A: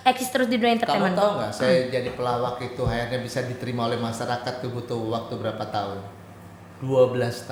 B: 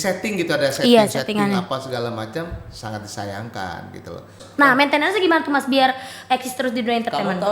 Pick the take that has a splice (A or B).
B